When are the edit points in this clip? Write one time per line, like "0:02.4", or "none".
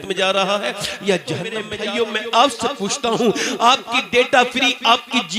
0:01.7